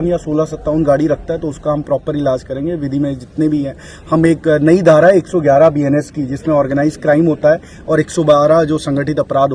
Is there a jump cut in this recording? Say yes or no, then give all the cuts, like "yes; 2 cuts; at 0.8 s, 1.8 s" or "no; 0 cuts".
no; 0 cuts